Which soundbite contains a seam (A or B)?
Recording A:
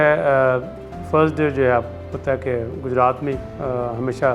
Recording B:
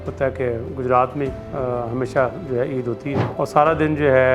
B